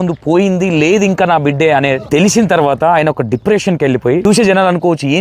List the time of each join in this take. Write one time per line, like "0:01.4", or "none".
0:02.0
0:04.2